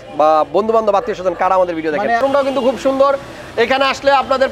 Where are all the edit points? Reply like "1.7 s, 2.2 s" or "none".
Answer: 2.2 s